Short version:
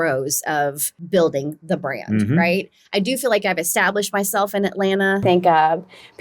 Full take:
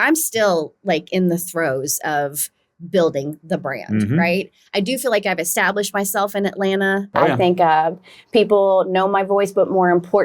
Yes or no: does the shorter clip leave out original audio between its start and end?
yes